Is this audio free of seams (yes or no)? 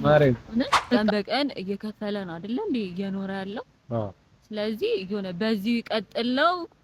no